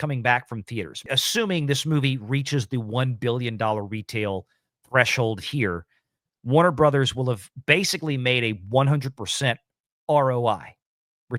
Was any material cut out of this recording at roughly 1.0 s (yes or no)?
yes